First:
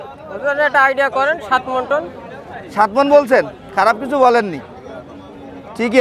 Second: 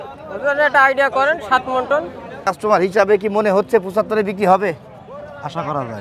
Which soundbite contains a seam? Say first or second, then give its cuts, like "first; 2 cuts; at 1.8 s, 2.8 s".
second; 1 cut; at 2.5 s